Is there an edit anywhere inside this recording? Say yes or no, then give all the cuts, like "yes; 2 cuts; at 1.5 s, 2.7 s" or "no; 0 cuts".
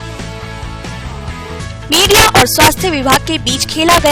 yes; 1 cut; at 1.0 s